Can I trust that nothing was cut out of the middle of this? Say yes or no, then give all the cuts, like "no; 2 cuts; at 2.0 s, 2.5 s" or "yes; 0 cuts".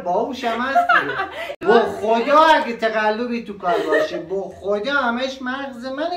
no; 1 cut; at 1.4 s